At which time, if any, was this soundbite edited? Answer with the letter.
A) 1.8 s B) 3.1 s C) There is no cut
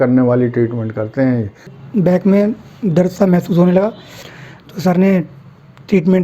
A